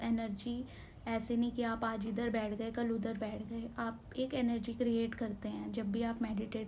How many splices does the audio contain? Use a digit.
0